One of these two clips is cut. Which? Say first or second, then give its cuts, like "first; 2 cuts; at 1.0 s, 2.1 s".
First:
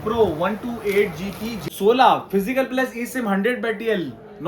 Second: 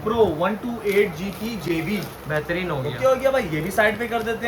first; 1 cut; at 1.6 s